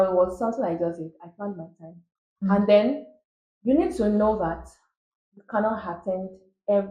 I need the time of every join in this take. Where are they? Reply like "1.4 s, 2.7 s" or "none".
none